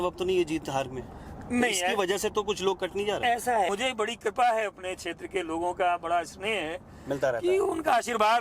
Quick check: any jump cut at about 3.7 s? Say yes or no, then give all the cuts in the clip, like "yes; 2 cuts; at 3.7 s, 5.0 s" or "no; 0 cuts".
yes; 1 cut; at 3.7 s